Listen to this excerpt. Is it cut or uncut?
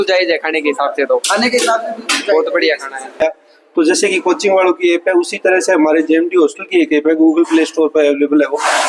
cut